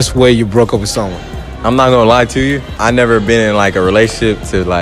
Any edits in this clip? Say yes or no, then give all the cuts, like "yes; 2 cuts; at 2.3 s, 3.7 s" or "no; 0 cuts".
yes; 1 cut; at 2.7 s